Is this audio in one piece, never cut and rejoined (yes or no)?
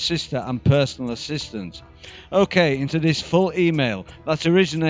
no